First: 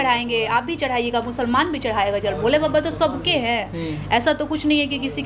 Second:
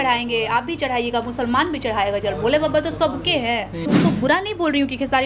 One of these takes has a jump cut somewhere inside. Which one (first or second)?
second